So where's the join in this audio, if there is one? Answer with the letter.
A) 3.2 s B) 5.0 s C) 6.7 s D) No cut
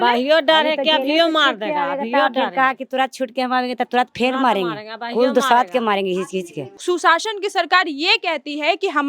C